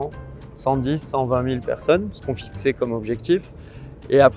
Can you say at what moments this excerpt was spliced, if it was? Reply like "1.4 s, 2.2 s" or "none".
2.2 s

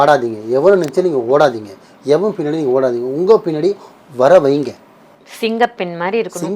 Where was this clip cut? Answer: none

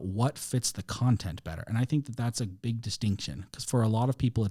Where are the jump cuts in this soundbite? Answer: none

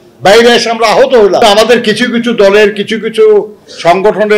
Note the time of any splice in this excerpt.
1.4 s

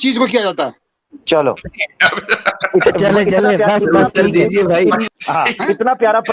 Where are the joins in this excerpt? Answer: 5.1 s

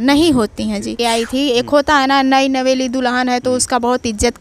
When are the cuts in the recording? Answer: 0.9 s

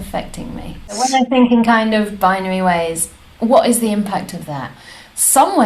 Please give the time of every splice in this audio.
1.0 s

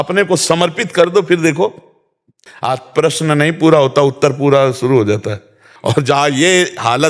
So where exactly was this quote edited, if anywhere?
2.1 s

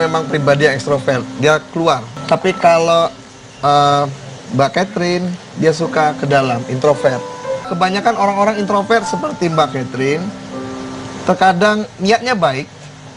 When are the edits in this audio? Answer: 2.1 s, 7.7 s

